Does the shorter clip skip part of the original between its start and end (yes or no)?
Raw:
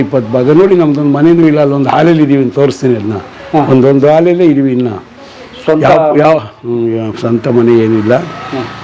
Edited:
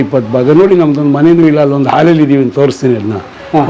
no